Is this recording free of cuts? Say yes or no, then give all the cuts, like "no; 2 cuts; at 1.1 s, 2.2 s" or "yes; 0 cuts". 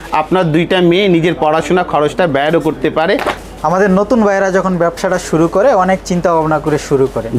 no; 1 cut; at 3.4 s